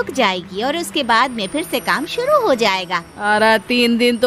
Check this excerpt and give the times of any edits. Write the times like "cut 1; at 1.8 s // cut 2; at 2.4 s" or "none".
cut 1; at 3.0 s